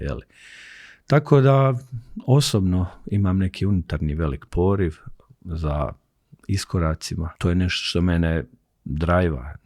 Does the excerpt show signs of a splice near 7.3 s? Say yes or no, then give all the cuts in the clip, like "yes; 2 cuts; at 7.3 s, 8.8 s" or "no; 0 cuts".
yes; 1 cut; at 7.3 s